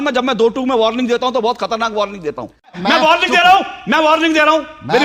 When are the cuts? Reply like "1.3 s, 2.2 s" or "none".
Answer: 2.7 s